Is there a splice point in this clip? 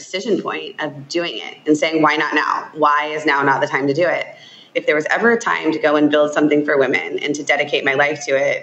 yes; 1 cut; at 4.7 s

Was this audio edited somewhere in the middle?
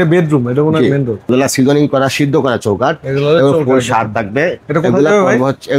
yes; 1 cut; at 1.2 s

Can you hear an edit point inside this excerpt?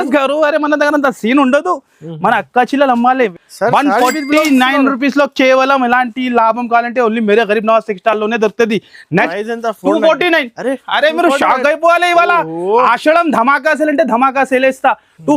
yes; 2 cuts; at 3.3 s, 9.3 s

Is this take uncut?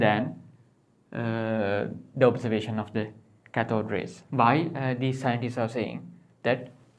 no; 1 cut; at 4.2 s

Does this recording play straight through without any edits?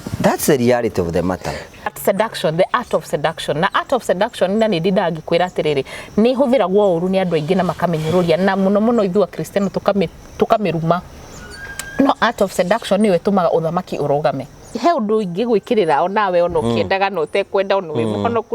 no; 2 cuts; at 2.0 s, 14.7 s

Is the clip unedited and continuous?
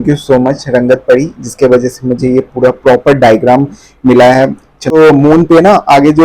no; 1 cut; at 4.9 s

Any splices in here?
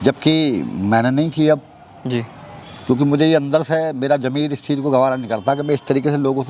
no; 0 cuts

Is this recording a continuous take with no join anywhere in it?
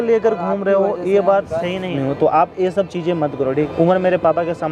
no; 2 cuts; at 1.9 s, 3.5 s

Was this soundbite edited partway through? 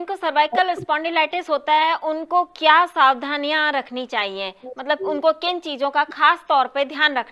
no; 0 cuts

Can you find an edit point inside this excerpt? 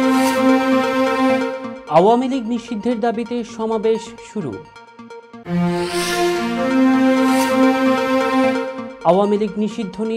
yes; 1 cut; at 1.7 s

